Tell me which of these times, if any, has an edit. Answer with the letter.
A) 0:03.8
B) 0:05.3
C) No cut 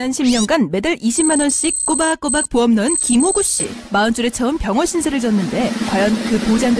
C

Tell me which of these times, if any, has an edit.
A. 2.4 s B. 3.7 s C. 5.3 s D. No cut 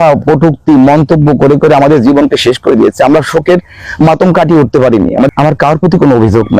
C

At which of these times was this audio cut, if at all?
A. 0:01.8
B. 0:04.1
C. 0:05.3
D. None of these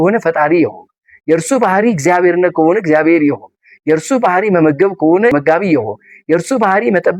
C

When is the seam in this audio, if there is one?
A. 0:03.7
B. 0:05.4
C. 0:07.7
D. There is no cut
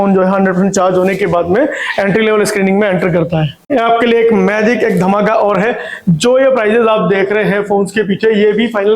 A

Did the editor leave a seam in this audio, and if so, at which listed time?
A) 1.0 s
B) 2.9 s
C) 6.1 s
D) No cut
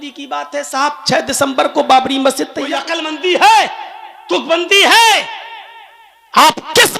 B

